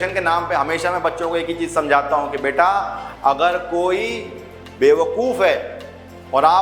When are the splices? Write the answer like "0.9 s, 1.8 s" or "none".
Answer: none